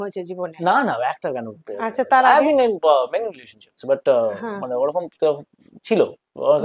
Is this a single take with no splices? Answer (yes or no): yes